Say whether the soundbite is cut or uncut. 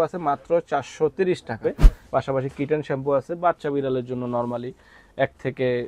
cut